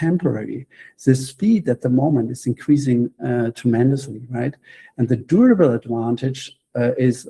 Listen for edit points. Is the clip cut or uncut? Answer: uncut